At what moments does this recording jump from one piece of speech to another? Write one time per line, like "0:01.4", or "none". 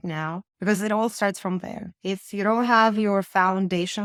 none